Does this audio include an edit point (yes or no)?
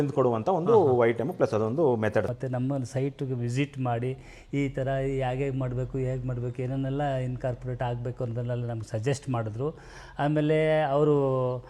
yes